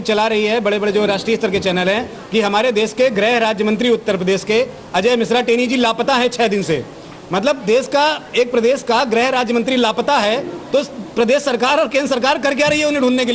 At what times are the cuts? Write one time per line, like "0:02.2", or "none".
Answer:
none